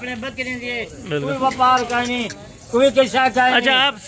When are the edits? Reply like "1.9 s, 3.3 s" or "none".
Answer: none